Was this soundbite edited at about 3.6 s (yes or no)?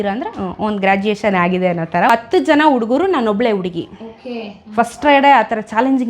no